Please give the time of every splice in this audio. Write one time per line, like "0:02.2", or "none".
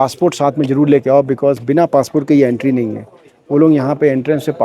none